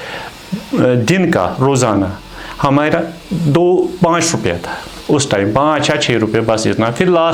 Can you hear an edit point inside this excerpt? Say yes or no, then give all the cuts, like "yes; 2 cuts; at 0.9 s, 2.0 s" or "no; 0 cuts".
no; 0 cuts